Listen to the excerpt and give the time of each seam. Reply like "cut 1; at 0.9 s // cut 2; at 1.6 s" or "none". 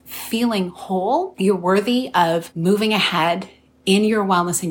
cut 1; at 1.3 s // cut 2; at 2.5 s